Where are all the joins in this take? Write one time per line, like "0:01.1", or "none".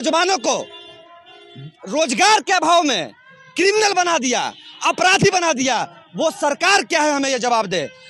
none